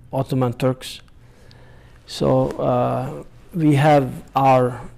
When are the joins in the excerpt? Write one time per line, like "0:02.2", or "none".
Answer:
none